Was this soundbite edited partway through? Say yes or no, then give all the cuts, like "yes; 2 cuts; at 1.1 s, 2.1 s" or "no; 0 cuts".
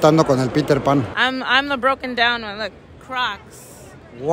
yes; 1 cut; at 1.2 s